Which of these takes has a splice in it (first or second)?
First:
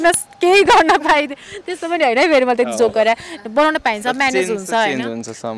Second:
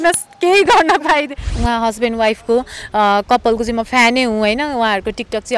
second